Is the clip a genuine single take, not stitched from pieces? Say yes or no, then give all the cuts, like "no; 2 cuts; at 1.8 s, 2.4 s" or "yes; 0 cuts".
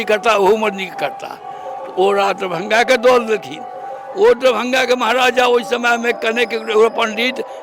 yes; 0 cuts